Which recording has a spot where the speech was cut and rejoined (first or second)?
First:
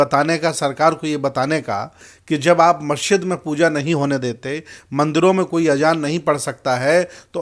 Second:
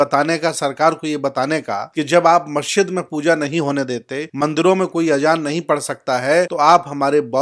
second